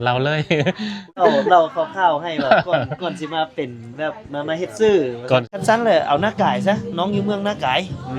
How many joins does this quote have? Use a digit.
2